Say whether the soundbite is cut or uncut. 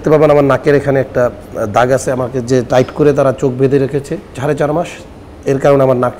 cut